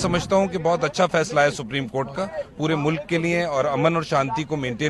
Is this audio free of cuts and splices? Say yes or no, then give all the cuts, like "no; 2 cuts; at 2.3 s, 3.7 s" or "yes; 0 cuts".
yes; 0 cuts